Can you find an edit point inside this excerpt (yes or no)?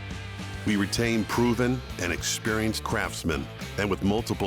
no